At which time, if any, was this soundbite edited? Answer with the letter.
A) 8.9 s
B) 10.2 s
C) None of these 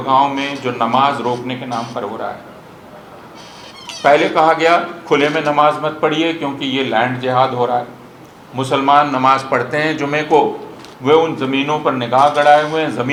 C